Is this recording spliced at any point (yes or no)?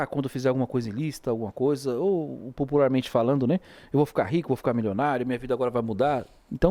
no